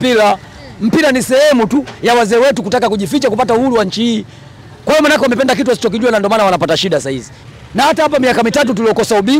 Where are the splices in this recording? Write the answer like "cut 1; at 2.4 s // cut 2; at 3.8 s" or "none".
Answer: cut 1; at 7.4 s